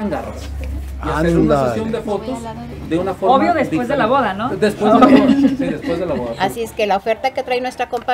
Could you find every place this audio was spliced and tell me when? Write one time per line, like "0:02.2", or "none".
0:06.3